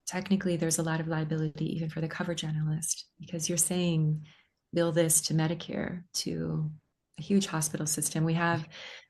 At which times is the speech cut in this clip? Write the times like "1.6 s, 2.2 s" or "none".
none